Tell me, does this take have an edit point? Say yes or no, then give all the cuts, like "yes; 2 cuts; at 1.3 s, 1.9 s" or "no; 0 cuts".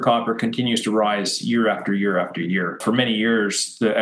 no; 0 cuts